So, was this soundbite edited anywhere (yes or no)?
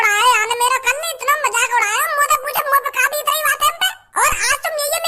yes